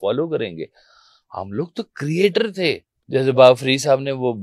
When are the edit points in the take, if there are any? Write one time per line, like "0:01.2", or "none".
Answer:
0:02.9